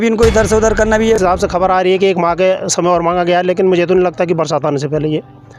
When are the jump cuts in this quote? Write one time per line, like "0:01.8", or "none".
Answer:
0:01.2